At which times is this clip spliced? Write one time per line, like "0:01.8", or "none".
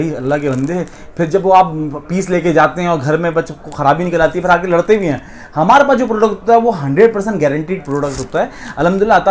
none